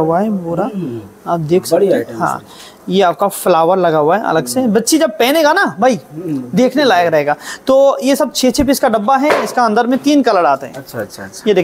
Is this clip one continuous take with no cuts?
yes; 0 cuts

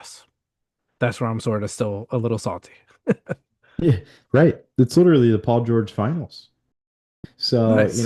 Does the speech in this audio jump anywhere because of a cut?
yes; 1 cut; at 6.9 s

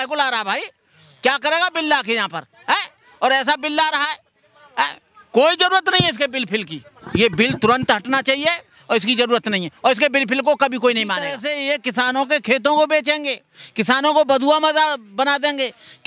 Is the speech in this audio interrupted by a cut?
yes; 1 cut; at 11.4 s

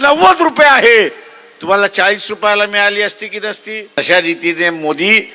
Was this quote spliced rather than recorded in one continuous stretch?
yes; 1 cut; at 4.0 s

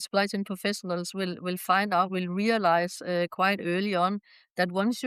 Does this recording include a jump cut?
no; 0 cuts

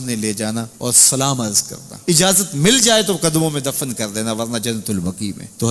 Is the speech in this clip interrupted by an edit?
no; 0 cuts

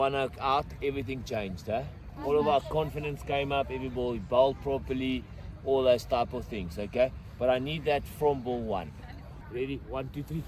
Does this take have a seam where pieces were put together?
no; 0 cuts

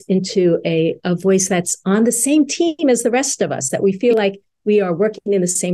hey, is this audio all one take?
yes; 0 cuts

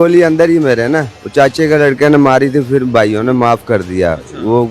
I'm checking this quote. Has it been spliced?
yes; 1 cut; at 1.2 s

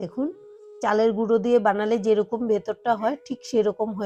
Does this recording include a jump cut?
no; 0 cuts

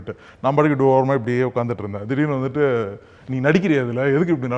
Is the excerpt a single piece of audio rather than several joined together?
yes; 0 cuts

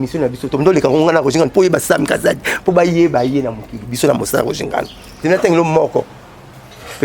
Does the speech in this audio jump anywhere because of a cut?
yes; 1 cut; at 5.2 s

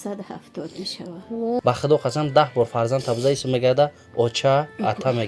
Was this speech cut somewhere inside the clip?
yes; 1 cut; at 1.6 s

